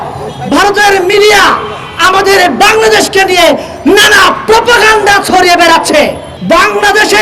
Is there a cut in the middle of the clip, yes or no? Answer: yes